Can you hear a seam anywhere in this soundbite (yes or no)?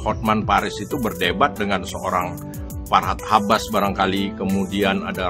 no